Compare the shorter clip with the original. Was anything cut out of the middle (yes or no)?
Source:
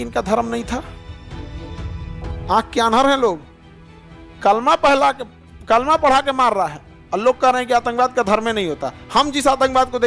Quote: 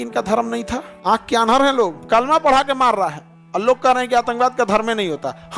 yes